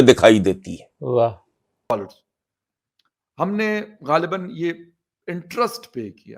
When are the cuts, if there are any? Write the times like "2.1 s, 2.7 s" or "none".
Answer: 1.9 s